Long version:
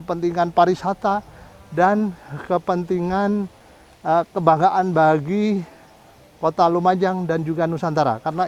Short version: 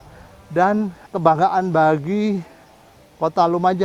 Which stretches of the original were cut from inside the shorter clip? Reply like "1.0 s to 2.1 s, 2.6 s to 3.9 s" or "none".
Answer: 2.3 s to 4.3 s